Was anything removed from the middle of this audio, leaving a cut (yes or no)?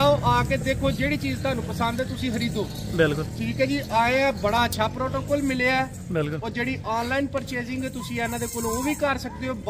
no